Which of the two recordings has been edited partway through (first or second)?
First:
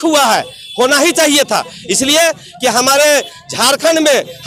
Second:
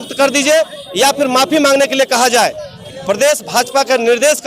second